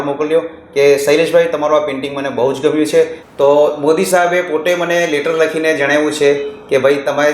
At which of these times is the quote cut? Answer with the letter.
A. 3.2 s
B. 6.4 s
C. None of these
A